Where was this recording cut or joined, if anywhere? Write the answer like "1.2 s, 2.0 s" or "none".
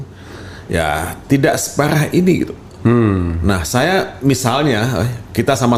none